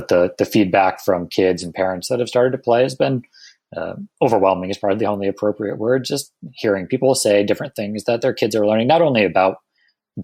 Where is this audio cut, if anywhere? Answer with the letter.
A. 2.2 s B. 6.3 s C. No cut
C